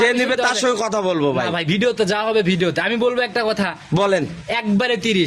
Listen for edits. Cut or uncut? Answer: uncut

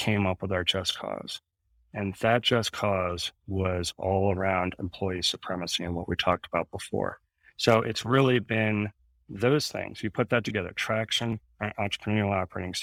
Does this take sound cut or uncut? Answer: uncut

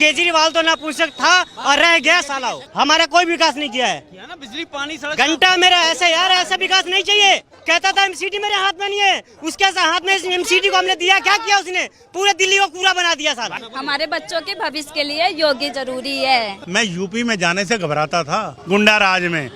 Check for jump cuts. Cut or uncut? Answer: cut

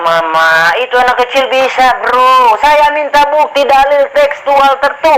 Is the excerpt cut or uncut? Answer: uncut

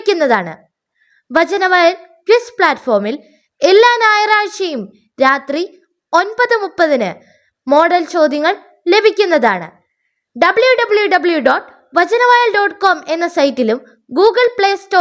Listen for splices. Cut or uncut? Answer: uncut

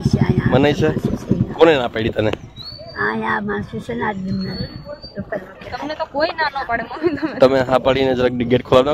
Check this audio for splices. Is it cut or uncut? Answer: uncut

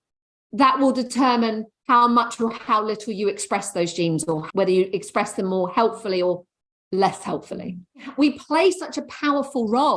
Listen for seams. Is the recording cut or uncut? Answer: cut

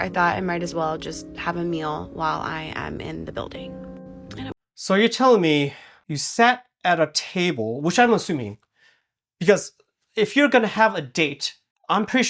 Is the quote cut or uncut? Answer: uncut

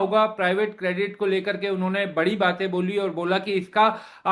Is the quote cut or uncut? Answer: uncut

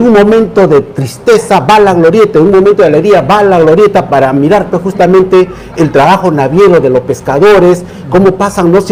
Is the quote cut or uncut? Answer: uncut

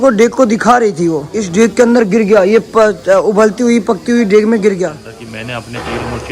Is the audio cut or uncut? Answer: cut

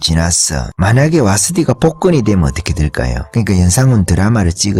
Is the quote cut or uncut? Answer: uncut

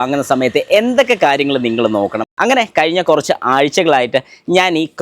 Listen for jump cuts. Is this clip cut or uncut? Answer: cut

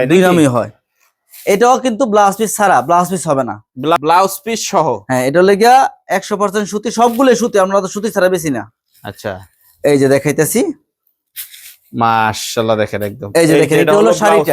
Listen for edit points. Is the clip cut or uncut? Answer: cut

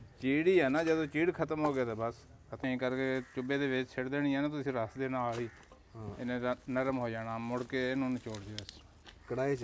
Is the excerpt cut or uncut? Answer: cut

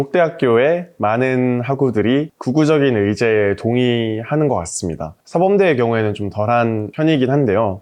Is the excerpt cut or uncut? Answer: uncut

